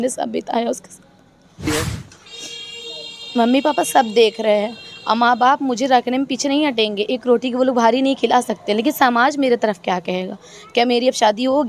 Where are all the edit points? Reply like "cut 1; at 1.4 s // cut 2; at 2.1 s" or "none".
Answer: cut 1; at 1.7 s